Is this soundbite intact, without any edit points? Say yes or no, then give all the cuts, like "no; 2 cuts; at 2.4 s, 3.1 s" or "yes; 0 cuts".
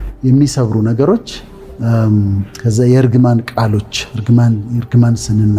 yes; 0 cuts